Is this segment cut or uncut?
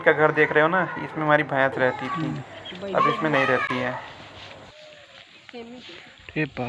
uncut